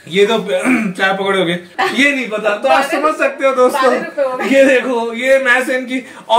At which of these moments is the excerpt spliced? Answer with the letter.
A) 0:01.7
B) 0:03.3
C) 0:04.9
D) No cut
A